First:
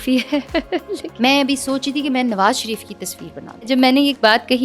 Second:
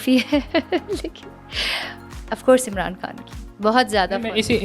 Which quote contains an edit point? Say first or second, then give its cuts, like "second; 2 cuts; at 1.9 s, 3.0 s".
first; 2 cuts; at 1.1 s, 3.7 s